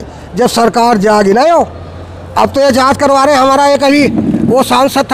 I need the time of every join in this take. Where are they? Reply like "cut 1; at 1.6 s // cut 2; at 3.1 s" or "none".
none